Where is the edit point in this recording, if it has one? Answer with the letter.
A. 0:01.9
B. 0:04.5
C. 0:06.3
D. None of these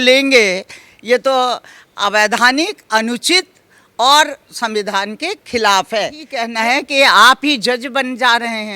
C